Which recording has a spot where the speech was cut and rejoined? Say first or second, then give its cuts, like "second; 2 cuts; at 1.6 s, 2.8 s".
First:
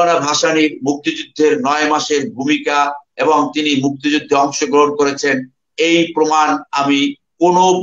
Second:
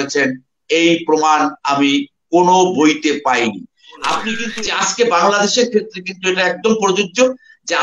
second; 1 cut; at 4.4 s